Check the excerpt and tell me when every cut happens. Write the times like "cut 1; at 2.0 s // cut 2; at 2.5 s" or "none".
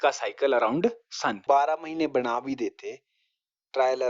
cut 1; at 1.4 s